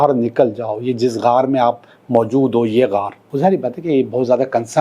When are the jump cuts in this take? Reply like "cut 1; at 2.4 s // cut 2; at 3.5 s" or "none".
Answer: cut 1; at 3.2 s